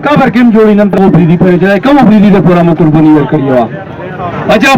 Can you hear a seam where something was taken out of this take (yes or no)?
yes